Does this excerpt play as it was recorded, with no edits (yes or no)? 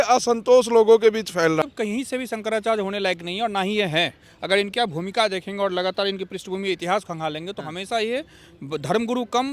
no